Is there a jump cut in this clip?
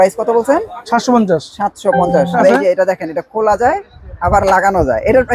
yes; 1 cut; at 2.3 s

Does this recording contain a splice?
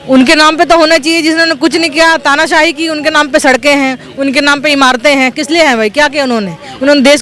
no; 0 cuts

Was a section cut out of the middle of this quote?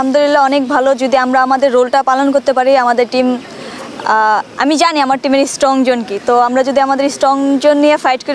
no; 0 cuts

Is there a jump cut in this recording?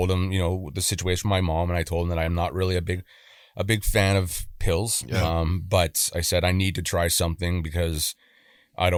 no; 0 cuts

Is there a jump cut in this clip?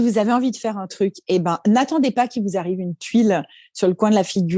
no; 0 cuts

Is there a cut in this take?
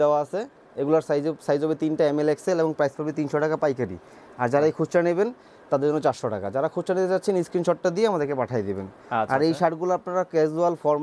no; 0 cuts

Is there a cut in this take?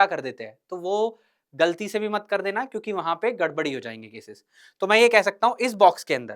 no; 0 cuts

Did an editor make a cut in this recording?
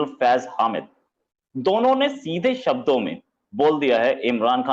no; 0 cuts

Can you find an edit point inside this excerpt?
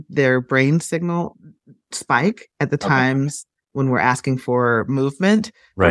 no; 0 cuts

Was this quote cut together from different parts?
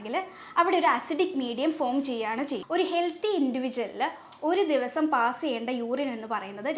yes; 1 cut; at 2.6 s

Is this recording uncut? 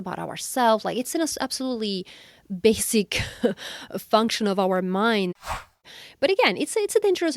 no; 1 cut; at 5.5 s

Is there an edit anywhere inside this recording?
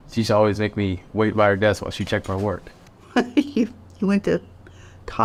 no; 0 cuts

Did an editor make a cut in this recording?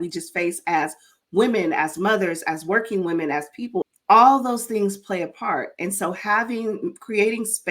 yes; 1 cut; at 3.8 s

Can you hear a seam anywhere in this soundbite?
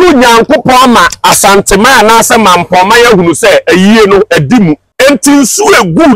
yes; 1 cut; at 4.9 s

